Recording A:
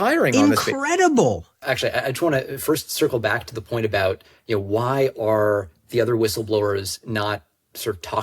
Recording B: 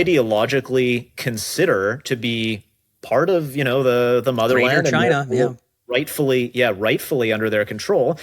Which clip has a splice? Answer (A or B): A